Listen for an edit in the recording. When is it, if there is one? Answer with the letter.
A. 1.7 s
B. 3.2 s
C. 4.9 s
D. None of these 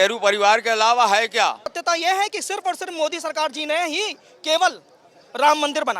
A